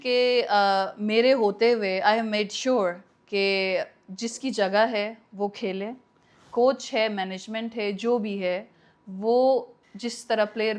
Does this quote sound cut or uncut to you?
uncut